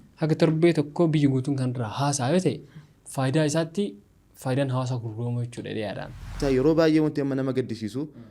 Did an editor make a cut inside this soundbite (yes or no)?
yes